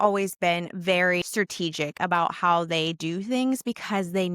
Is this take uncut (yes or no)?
no